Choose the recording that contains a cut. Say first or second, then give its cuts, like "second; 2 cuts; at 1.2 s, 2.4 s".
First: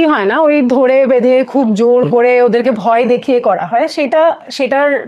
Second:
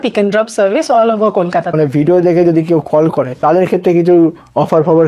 second; 2 cuts; at 1.7 s, 3.4 s